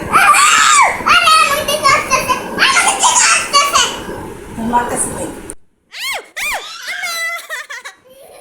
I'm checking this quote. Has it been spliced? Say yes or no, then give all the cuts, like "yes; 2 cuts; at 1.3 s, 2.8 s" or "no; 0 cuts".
no; 0 cuts